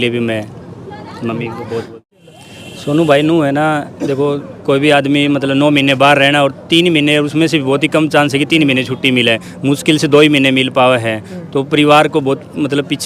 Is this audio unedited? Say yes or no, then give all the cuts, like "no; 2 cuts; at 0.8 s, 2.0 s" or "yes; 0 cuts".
no; 1 cut; at 2.1 s